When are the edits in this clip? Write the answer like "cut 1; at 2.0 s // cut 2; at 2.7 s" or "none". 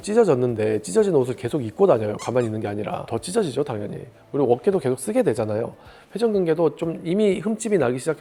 none

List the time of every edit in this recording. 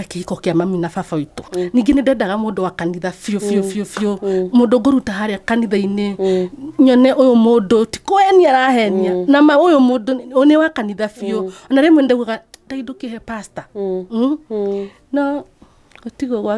cut 1; at 1.5 s

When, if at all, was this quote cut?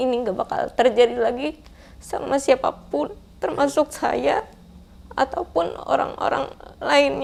none

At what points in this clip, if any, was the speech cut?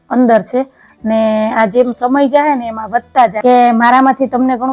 cut 1; at 3.3 s

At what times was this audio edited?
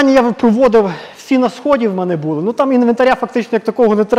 none

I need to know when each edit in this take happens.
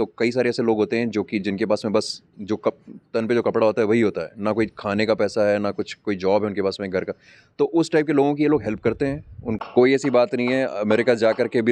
cut 1; at 9.5 s

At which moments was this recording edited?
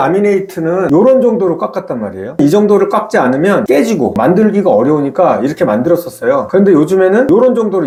none

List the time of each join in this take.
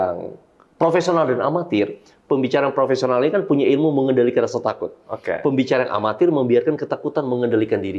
none

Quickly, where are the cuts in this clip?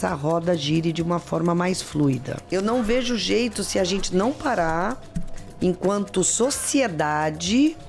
cut 1; at 2.3 s

